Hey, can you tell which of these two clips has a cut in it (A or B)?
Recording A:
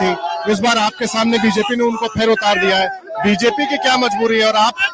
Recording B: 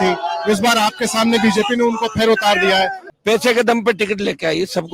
B